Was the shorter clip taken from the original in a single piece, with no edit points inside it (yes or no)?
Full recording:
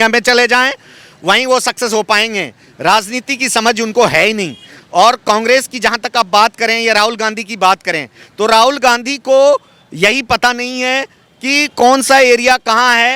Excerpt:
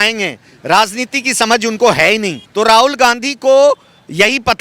no